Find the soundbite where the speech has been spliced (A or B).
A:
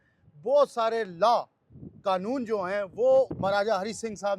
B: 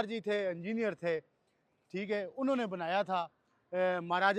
A